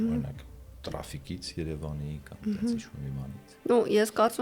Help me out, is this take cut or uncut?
cut